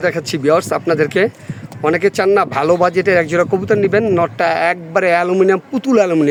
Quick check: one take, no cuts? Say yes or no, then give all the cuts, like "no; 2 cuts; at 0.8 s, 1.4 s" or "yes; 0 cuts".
yes; 0 cuts